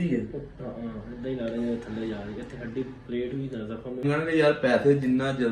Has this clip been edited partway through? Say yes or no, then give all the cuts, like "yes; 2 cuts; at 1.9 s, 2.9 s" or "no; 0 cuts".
yes; 1 cut; at 4.0 s